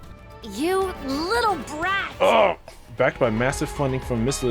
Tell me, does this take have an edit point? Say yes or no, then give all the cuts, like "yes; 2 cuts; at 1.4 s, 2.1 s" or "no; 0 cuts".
yes; 1 cut; at 2.8 s